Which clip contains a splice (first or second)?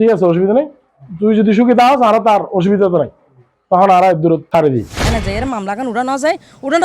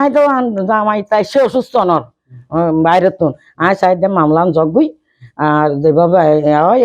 first